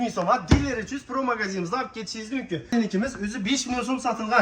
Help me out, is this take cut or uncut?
cut